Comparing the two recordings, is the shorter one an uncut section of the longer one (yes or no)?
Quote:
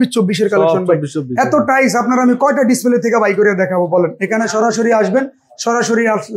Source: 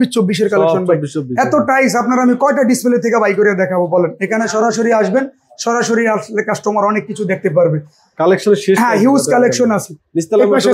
yes